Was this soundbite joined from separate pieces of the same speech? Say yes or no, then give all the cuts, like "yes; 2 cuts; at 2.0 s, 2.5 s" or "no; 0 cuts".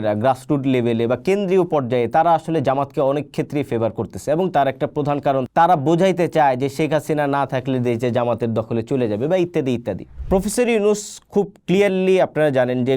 yes; 2 cuts; at 5.5 s, 10.1 s